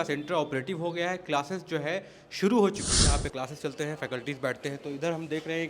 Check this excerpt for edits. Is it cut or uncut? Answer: cut